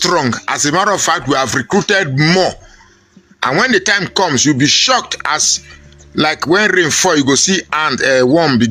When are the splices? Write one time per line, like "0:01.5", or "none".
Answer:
none